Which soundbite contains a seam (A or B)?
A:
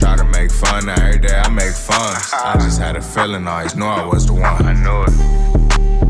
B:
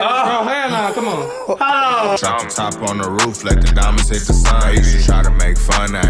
B